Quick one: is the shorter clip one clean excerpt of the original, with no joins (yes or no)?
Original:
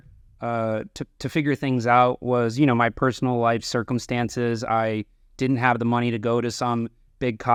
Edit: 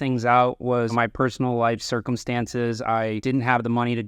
no